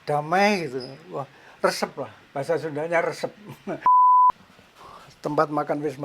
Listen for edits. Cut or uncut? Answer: cut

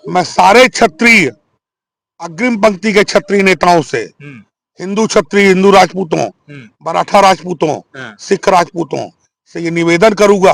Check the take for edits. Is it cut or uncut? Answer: uncut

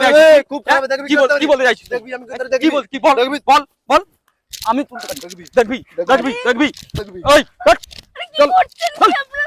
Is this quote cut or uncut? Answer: uncut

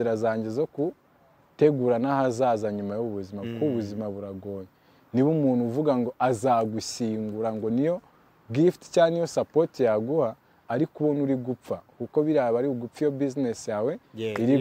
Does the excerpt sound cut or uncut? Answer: uncut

